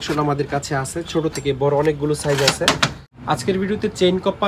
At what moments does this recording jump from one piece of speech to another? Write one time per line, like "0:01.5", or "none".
0:03.1